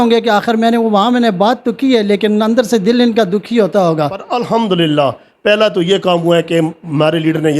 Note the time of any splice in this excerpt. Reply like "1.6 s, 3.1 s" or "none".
4.3 s